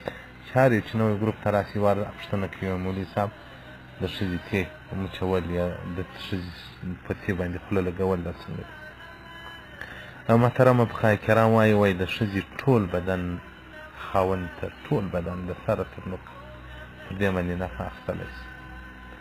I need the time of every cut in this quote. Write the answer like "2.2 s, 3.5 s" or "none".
10.9 s